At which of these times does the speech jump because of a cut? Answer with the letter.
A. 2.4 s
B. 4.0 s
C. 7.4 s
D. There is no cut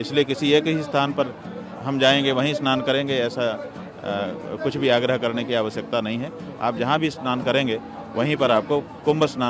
D